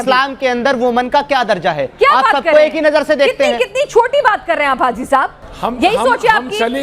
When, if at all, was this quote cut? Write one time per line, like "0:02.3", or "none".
0:05.4